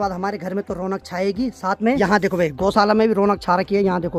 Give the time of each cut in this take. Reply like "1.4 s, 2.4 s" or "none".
none